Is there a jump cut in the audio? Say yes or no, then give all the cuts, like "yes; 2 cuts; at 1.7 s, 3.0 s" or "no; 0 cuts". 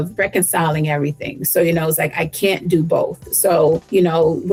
no; 0 cuts